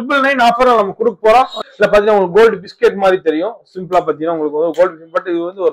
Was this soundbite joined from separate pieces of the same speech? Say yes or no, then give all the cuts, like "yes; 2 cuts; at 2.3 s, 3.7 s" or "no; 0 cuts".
yes; 1 cut; at 1.6 s